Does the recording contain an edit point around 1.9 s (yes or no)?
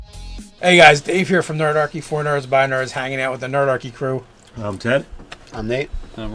yes